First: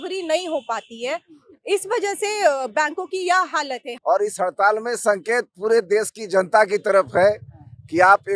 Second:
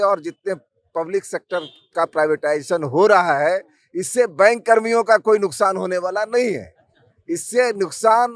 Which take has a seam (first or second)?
first